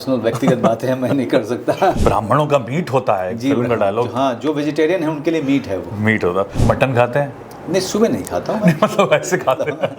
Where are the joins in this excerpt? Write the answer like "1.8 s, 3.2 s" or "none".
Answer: 2.0 s, 6.5 s